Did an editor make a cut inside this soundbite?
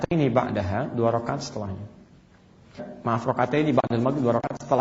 yes; 1 cut; at 2.9 s

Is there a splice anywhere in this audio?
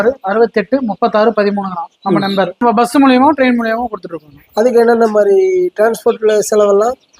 yes; 1 cut; at 2.6 s

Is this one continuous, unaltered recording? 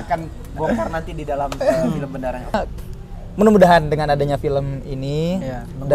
no; 1 cut; at 2.5 s

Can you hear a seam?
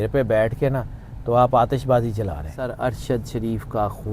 yes; 1 cut; at 2.6 s

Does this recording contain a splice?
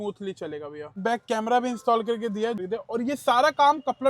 yes; 2 cuts; at 1.0 s, 2.6 s

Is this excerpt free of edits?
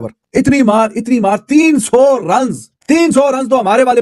no; 1 cut; at 2.7 s

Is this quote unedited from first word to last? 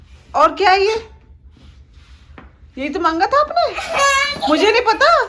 yes; 0 cuts

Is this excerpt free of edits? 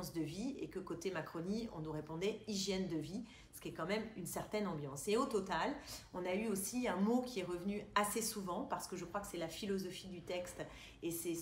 yes; 0 cuts

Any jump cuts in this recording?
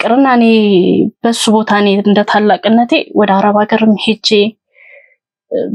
no; 0 cuts

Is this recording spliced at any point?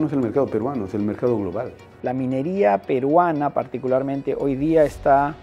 yes; 1 cut; at 2.0 s

